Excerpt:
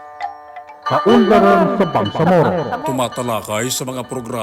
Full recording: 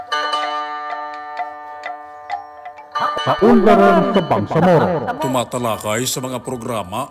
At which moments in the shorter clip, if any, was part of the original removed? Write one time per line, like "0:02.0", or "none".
0:00.9

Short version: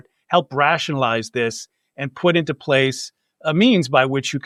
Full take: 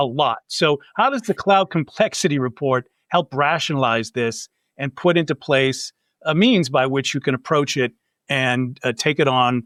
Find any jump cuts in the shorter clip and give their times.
none

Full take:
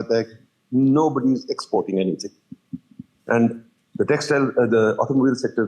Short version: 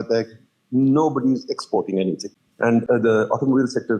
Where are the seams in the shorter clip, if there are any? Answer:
0:02.8

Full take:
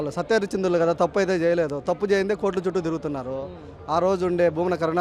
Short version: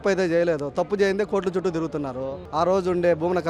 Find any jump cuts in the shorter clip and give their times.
0:02.4

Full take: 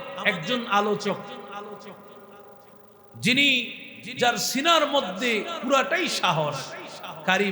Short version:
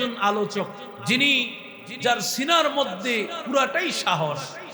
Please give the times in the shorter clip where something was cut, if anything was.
0:00.9

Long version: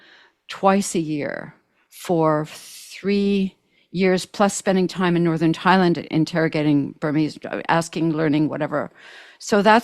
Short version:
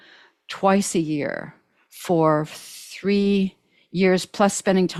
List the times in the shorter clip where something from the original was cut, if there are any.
none

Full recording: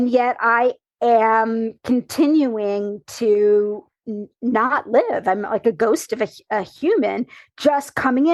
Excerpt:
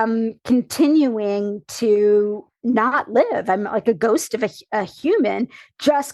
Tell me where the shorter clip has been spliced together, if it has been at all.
0:02.5

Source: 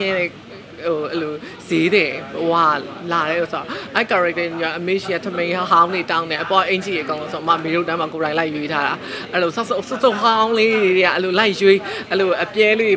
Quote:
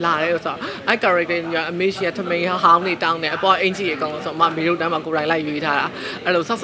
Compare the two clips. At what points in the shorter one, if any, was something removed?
none

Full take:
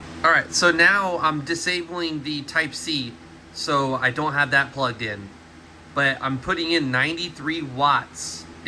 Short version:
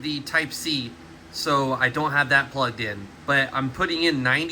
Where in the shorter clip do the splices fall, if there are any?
0:03.1

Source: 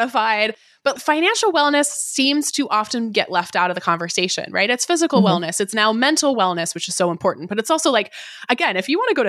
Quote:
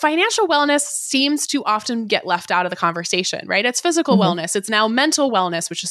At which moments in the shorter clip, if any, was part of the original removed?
none

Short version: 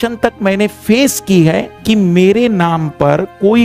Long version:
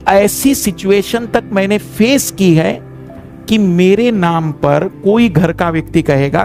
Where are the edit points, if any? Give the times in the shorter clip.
0:01.7

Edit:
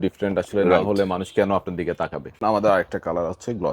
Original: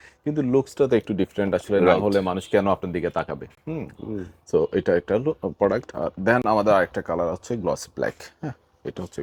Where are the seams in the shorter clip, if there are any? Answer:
0:02.4

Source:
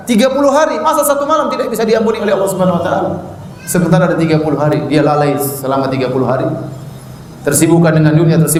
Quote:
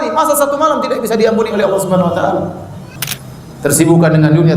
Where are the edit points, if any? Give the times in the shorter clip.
0:02.9

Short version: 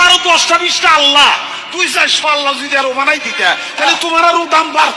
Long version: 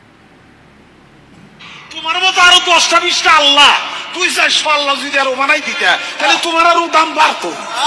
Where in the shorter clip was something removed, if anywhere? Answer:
none

